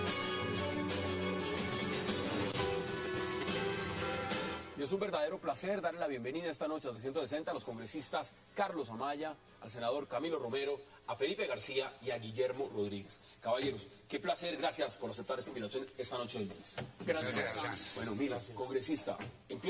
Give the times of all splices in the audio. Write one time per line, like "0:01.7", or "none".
0:02.8